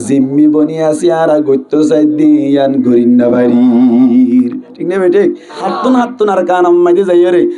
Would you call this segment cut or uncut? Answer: cut